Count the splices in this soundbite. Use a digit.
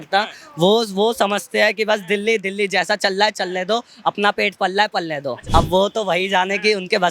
1